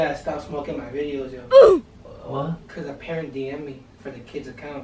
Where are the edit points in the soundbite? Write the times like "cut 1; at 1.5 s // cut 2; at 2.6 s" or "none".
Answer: cut 1; at 2.7 s